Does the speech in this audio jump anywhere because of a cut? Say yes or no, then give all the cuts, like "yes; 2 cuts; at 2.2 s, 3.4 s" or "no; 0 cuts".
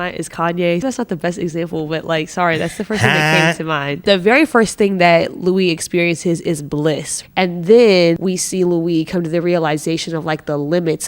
yes; 4 cuts; at 0.8 s, 4.0 s, 7.2 s, 8.2 s